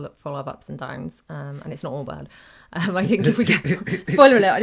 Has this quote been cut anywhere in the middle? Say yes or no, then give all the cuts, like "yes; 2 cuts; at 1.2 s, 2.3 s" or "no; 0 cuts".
no; 0 cuts